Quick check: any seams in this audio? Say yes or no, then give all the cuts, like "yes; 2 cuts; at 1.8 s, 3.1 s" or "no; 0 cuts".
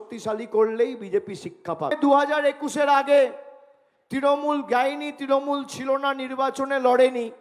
no; 0 cuts